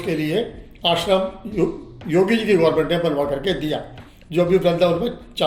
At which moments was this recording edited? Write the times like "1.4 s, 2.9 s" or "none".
none